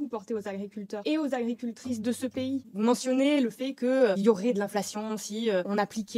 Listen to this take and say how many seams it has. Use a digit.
0